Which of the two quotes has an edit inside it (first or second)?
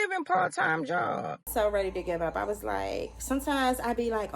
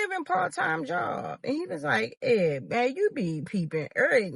first